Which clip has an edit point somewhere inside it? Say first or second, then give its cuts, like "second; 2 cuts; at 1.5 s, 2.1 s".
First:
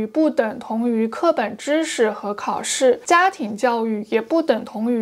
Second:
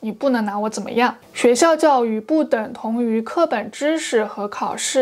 second; 1 cut; at 1.2 s